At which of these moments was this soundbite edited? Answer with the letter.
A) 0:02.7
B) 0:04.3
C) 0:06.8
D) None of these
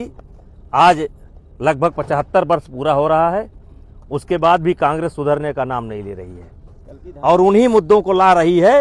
D